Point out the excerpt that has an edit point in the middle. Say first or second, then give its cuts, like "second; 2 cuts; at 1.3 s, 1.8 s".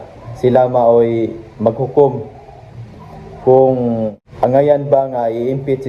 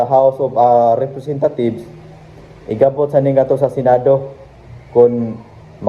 first; 1 cut; at 4.2 s